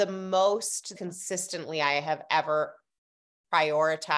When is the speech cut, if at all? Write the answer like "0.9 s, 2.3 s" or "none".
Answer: 0.9 s